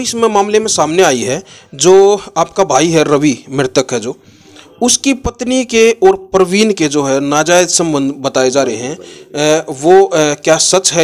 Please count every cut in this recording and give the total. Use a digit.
0